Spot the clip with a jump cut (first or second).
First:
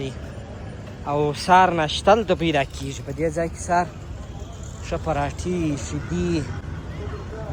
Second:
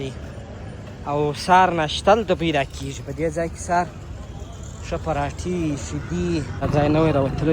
second